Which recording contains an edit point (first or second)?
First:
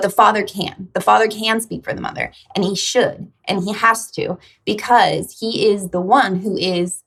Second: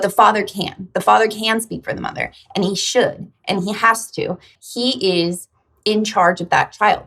second